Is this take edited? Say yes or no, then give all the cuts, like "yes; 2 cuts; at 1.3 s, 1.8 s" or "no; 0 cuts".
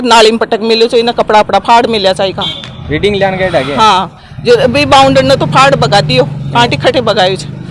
no; 0 cuts